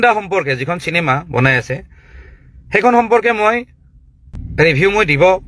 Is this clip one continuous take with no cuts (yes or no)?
yes